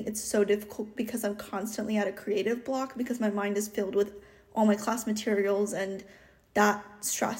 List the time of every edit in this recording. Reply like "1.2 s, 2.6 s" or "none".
none